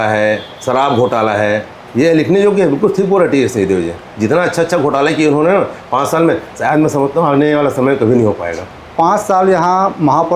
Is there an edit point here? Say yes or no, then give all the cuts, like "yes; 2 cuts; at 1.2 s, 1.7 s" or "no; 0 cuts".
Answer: yes; 1 cut; at 8.5 s